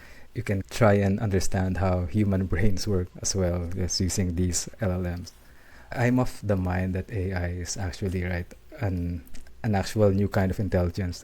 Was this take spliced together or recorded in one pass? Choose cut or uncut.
cut